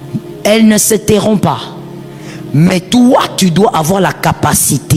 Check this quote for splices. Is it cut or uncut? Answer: uncut